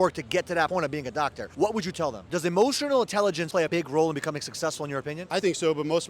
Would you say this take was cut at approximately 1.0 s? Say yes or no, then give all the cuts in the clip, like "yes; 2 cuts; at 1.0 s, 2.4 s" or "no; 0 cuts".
no; 1 cut; at 2.3 s